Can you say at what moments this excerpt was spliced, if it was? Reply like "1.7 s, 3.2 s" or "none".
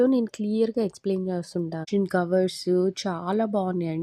1.9 s